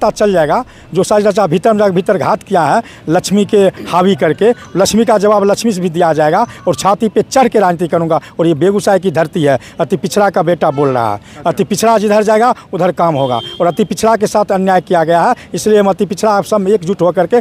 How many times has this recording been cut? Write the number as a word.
zero